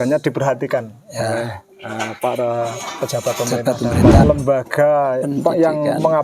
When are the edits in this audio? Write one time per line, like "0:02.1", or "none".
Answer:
0:04.2